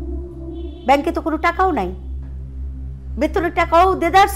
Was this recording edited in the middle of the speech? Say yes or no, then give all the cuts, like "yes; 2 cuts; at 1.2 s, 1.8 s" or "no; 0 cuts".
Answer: no; 0 cuts